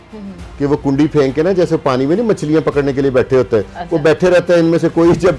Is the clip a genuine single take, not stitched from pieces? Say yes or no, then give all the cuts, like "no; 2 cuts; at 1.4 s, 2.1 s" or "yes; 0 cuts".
yes; 0 cuts